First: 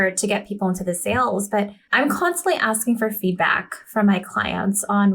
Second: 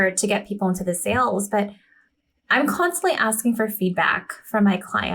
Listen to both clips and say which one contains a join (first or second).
first